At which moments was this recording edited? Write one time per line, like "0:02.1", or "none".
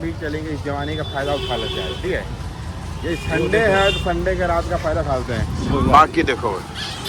none